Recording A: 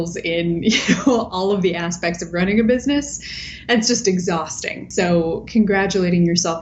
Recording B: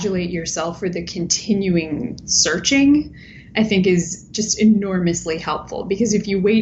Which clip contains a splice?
A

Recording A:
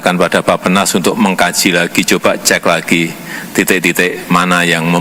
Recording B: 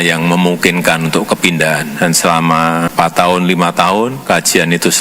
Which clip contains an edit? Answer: B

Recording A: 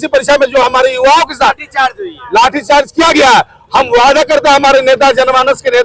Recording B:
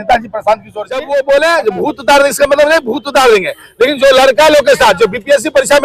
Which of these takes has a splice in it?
B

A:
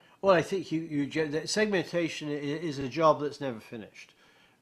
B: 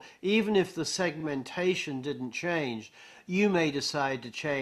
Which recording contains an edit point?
A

